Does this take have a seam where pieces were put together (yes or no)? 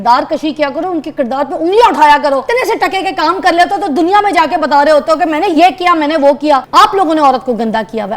yes